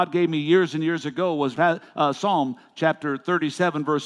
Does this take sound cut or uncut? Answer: cut